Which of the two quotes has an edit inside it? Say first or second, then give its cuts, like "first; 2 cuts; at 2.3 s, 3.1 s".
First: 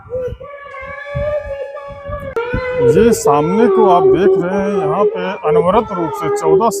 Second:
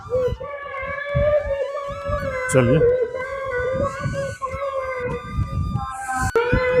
first; 1 cut; at 2.3 s